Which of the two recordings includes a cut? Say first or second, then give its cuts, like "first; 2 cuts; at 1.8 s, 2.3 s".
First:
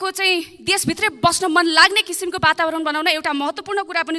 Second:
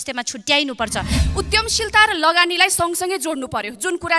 second; 1 cut; at 1.2 s